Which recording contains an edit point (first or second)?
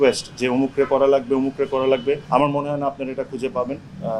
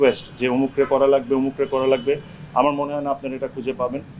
first